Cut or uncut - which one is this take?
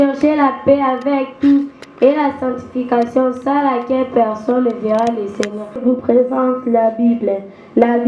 cut